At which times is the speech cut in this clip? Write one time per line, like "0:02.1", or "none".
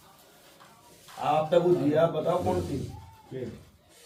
none